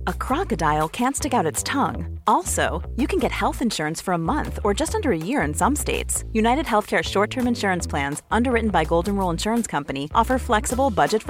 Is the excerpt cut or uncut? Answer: uncut